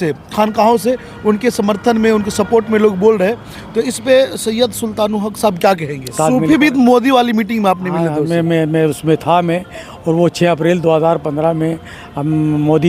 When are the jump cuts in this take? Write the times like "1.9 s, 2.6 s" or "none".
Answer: 6.1 s